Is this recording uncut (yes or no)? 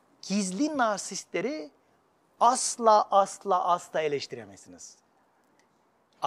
yes